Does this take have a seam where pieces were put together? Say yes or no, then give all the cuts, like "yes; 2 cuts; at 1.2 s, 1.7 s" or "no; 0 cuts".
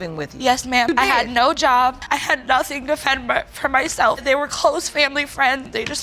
no; 0 cuts